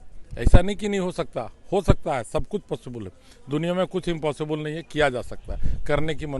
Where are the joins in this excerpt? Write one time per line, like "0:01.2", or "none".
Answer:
none